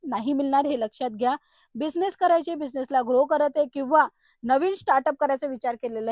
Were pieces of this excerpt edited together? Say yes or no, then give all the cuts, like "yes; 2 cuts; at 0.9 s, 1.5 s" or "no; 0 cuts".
no; 0 cuts